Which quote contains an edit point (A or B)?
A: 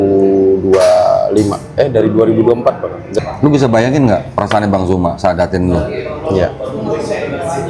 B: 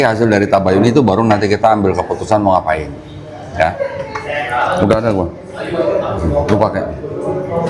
A